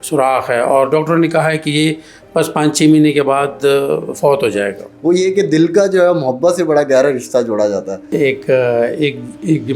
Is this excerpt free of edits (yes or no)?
no